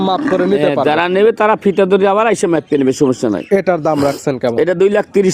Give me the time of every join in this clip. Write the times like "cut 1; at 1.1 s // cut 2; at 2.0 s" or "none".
none